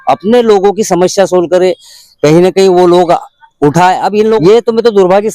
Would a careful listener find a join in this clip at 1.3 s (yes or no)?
no